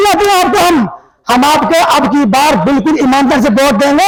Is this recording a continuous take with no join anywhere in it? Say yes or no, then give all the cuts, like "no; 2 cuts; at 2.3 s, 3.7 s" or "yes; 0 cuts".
yes; 0 cuts